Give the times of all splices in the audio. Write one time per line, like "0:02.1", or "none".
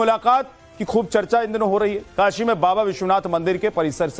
0:02.9